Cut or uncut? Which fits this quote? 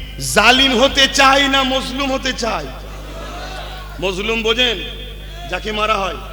uncut